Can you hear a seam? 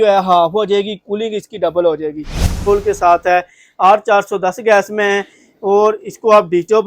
yes; 1 cut; at 2.7 s

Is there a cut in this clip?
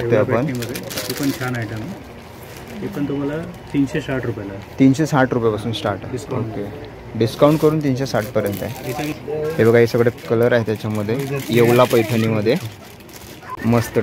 no; 0 cuts

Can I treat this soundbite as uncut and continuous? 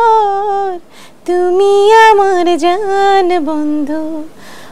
yes; 0 cuts

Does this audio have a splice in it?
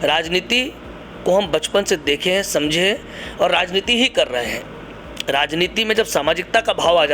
no; 0 cuts

